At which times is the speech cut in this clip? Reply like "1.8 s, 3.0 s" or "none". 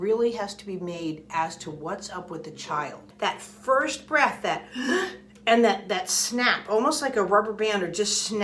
3.1 s